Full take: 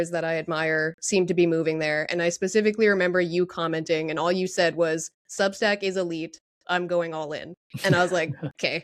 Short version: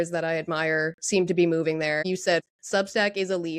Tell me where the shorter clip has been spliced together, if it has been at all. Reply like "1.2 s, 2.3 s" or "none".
2.3 s

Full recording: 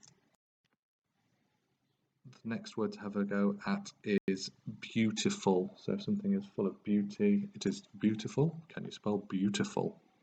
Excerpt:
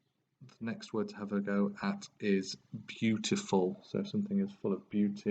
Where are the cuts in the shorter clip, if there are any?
2.3 s

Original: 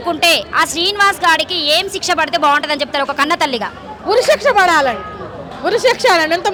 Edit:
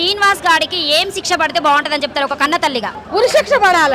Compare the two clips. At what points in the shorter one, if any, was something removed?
3.0 s

